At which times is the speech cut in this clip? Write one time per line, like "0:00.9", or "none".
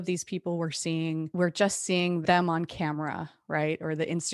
0:01.3
0:02.2